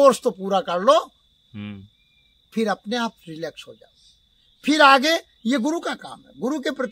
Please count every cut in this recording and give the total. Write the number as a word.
zero